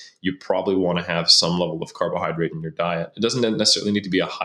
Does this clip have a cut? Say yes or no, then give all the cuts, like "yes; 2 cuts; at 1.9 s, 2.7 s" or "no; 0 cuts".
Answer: no; 0 cuts